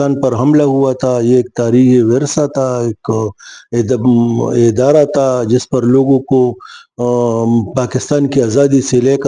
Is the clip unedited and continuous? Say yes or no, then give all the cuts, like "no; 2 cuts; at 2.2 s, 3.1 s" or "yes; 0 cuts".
yes; 0 cuts